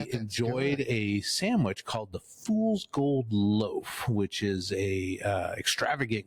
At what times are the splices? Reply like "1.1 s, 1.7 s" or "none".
none